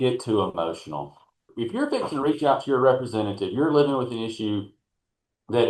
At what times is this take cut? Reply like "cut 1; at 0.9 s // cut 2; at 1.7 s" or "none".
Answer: cut 1; at 1.5 s